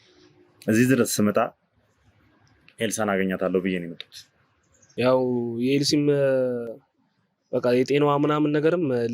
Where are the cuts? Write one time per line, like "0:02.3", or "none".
0:04.8